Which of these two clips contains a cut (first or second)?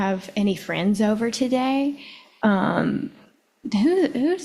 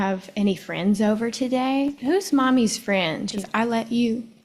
second